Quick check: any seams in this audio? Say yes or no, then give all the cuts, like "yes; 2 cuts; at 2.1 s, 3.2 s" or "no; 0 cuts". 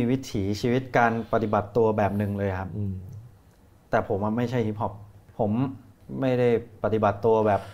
yes; 2 cuts; at 5.2 s, 5.9 s